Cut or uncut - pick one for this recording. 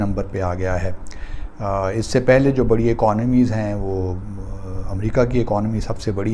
uncut